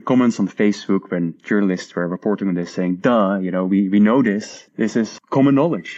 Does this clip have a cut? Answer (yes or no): yes